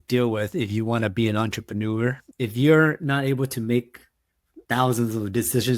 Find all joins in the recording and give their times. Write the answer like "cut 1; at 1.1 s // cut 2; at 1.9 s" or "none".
none